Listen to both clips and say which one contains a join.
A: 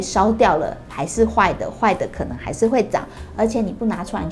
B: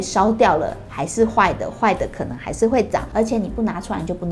B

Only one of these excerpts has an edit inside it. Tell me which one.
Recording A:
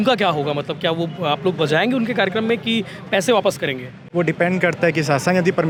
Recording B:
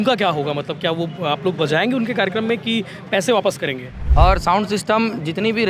B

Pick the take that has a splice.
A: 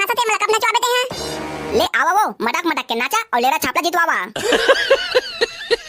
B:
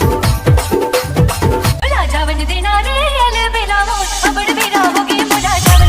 B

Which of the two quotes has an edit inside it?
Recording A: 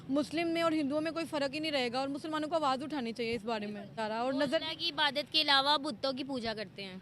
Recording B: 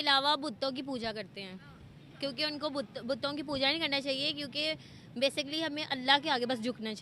A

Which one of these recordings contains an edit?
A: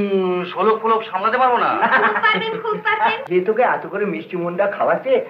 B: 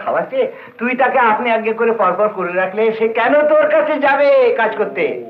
A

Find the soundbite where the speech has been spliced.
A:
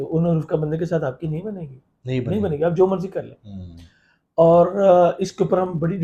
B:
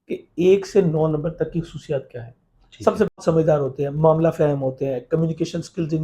B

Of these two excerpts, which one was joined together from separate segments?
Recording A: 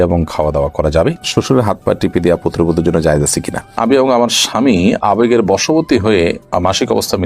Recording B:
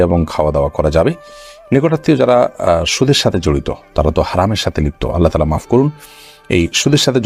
A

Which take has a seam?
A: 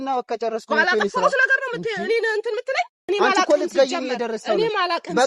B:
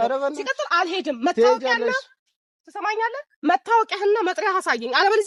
A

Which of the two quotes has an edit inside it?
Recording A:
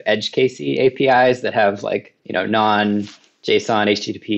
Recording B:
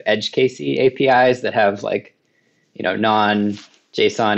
A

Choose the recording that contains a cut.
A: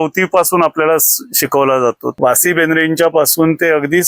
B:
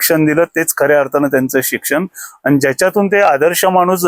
A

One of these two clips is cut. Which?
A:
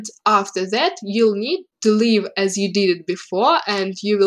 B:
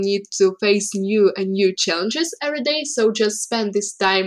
A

